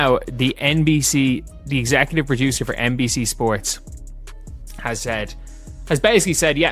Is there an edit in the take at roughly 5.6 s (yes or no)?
no